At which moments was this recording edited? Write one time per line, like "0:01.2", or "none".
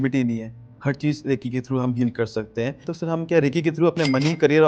0:02.9